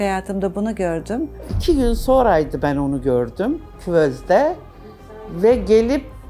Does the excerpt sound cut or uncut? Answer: cut